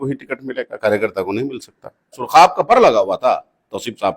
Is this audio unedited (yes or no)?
no